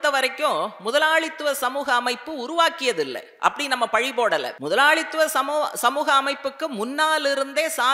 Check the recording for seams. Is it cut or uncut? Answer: cut